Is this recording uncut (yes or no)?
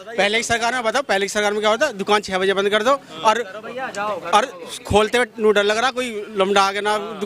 yes